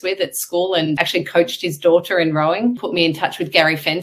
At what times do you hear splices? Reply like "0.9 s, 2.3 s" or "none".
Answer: 1.0 s, 2.8 s